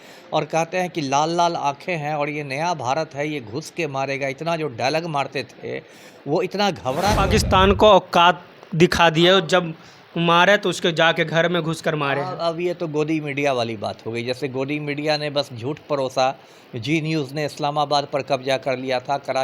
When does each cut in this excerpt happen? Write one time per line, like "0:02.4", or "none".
0:07.2